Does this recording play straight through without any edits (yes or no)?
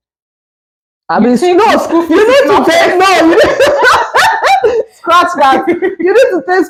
yes